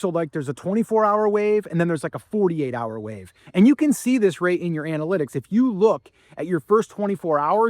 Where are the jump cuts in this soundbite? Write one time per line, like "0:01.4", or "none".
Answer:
0:03.4